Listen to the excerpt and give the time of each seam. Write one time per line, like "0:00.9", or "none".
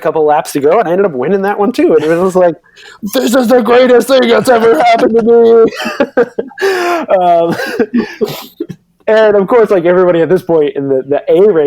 none